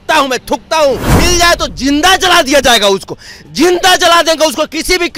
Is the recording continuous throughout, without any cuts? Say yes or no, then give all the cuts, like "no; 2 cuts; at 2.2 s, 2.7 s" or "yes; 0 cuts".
no; 1 cut; at 1.1 s